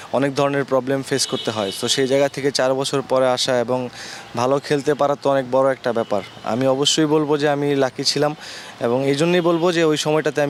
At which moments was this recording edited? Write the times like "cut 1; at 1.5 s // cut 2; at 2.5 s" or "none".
none